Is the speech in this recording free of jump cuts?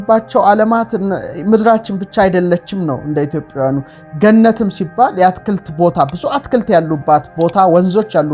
yes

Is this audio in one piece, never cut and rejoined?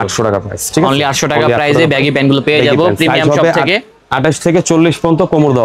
yes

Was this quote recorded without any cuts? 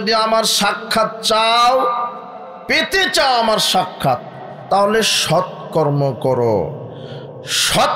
yes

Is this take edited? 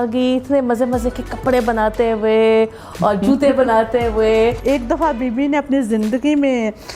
yes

